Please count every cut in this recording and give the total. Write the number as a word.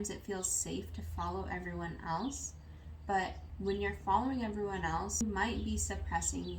two